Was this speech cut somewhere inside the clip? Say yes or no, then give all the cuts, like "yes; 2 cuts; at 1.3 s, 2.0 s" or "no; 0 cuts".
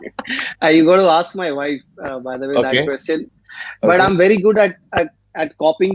no; 0 cuts